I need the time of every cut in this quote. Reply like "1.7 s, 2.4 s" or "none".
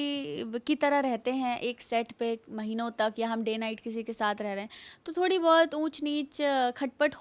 none